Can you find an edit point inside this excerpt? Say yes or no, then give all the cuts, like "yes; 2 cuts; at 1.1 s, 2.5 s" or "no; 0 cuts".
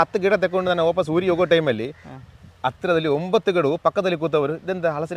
no; 0 cuts